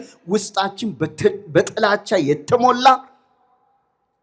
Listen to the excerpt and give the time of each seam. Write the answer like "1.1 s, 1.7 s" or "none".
none